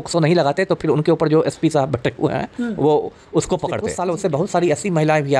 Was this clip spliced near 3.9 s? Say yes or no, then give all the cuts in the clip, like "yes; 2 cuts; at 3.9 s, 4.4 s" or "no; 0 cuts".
yes; 1 cut; at 3.9 s